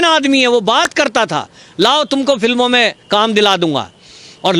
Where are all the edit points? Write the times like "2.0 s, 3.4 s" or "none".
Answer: none